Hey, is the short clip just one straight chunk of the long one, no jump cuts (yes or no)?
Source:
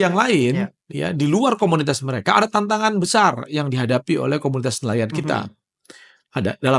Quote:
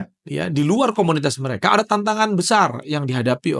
yes